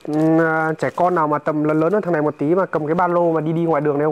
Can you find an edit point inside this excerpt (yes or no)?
no